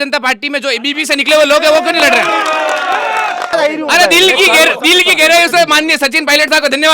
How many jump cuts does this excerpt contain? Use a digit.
1